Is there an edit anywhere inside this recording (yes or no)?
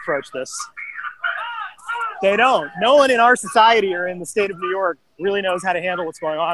no